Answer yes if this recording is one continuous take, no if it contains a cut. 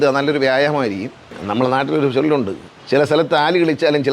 no